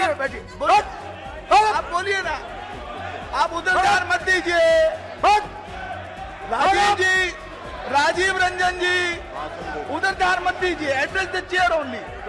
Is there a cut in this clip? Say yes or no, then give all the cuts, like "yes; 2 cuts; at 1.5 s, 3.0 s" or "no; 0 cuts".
no; 0 cuts